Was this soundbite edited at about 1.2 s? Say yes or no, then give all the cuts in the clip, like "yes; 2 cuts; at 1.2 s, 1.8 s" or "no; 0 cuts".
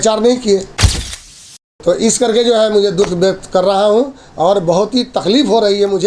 yes; 1 cut; at 1.2 s